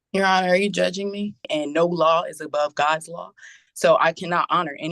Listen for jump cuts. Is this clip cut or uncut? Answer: cut